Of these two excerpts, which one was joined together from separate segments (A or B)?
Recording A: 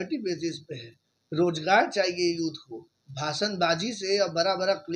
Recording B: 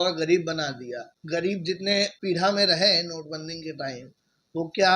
B